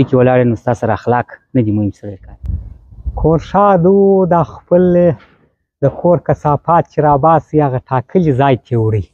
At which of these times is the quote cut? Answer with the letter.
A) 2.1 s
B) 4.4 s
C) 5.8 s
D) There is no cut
A